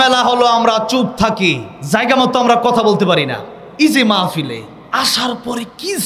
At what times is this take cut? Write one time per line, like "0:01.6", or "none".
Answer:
0:01.7
0:04.7